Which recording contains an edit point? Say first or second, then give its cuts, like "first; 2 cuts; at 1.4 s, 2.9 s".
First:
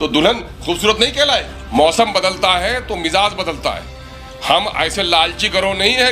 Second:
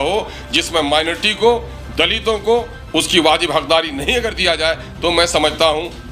first; 1 cut; at 1.6 s